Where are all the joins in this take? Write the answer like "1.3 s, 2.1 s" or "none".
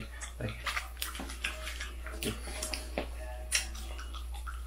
none